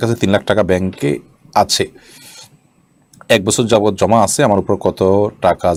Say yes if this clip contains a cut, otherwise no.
no